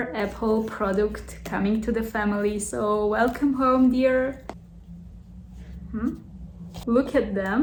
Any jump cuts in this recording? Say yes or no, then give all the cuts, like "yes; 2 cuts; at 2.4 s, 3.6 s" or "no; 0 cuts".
no; 0 cuts